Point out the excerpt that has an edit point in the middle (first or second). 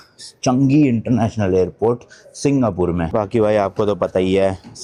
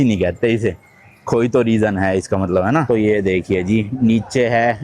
second